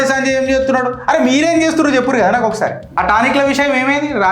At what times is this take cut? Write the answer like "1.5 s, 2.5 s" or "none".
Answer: 3.0 s

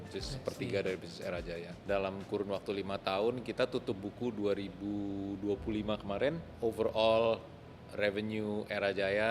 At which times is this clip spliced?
1.8 s, 6.5 s

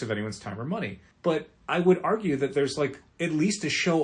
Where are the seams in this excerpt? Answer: 1.0 s, 3.1 s

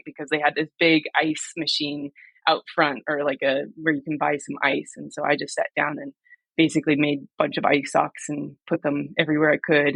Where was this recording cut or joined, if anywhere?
none

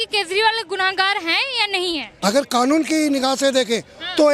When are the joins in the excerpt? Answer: 2.1 s

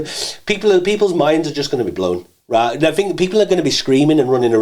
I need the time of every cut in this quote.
none

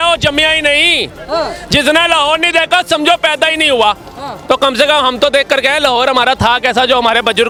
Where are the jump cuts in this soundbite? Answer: none

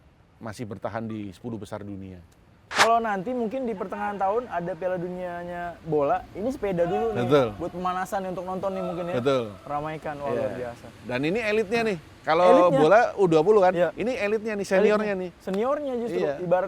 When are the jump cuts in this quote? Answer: 2.7 s

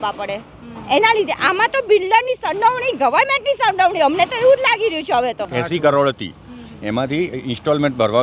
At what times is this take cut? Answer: 5.5 s

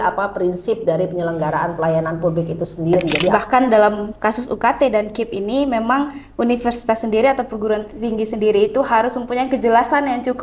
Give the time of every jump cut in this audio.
3.3 s

